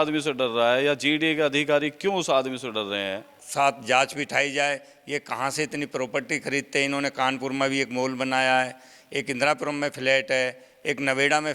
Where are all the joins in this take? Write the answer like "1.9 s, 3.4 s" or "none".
3.3 s